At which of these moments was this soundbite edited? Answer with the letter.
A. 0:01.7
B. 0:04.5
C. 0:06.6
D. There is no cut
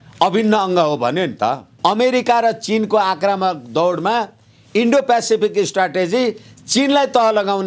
A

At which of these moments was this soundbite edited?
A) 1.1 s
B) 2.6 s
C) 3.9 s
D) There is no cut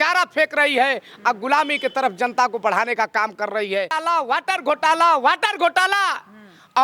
C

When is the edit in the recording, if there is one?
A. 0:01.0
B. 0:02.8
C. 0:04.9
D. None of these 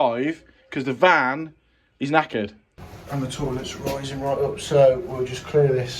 B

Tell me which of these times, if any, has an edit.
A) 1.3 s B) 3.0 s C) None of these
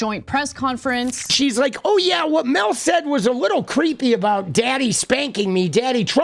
A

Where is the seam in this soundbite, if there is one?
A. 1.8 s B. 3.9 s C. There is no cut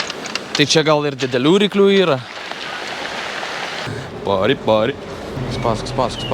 B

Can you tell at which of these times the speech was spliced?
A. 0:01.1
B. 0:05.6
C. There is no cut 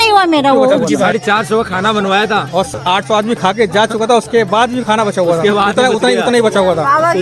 A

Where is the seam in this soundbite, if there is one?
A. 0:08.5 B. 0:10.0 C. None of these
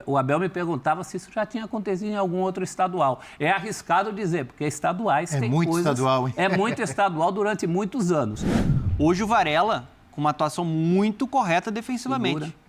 A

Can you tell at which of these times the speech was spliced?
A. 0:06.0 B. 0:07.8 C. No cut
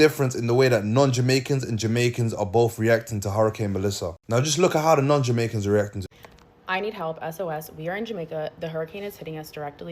A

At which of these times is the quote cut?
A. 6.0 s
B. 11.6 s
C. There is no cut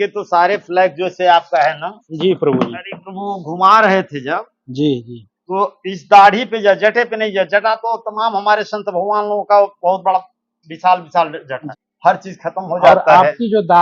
B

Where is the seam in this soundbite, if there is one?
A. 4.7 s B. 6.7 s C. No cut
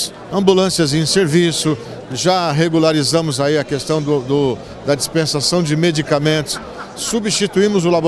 C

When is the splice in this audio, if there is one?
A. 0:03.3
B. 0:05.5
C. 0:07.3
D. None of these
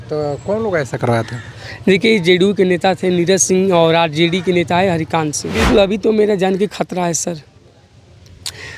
B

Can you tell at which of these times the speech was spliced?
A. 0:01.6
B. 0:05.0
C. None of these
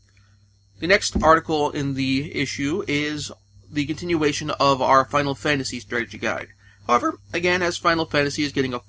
A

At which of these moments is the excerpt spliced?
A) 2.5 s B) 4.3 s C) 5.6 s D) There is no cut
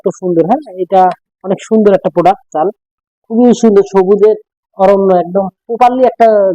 A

